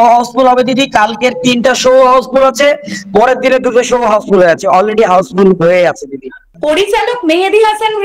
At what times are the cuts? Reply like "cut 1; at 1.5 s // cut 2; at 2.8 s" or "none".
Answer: cut 1; at 6.5 s